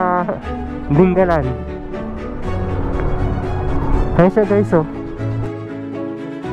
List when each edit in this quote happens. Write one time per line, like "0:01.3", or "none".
none